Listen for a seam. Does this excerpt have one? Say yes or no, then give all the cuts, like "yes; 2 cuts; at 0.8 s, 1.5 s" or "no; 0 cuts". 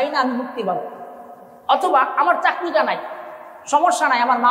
no; 0 cuts